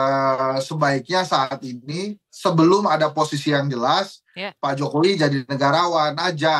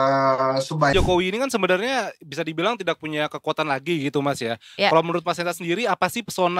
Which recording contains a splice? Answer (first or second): second